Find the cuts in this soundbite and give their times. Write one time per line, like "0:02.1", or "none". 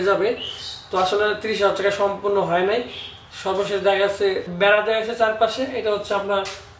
0:04.5

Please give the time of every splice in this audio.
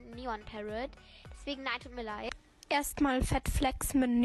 none

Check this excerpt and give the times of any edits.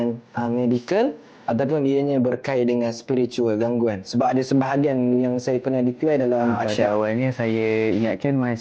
0:06.7

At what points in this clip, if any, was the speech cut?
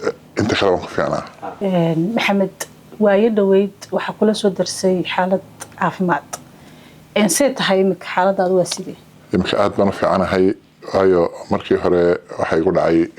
0:01.6

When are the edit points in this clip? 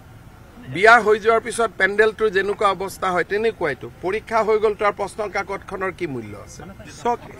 0:04.9

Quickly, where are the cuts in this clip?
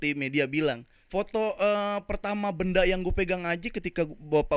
0:00.9

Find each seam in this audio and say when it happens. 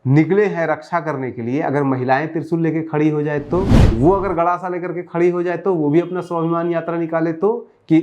0:03.8

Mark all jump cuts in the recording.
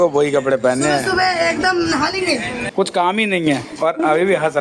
0:02.6

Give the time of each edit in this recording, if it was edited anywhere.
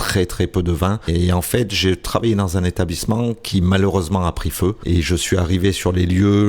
0:01.1
0:04.8

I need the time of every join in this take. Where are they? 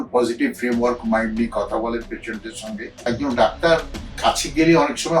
0:03.0

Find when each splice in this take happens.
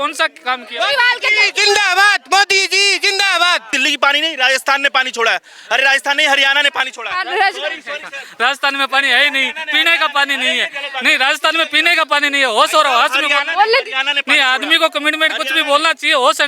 0:03.7

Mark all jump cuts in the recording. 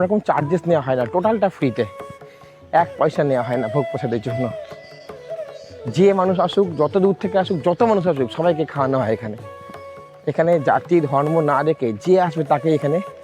none

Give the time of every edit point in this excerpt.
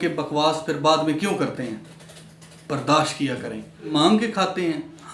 0:03.9

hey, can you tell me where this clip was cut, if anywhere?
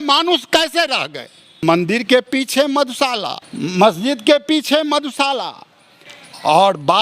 0:01.6
0:03.4

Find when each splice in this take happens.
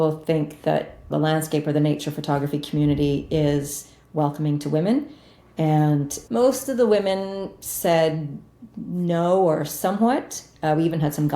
0:01.1
0:06.1

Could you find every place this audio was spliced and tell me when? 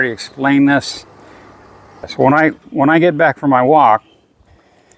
0:02.1

